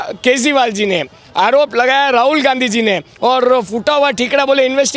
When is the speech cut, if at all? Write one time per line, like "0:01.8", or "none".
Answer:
none